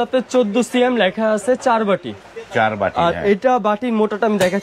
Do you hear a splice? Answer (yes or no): no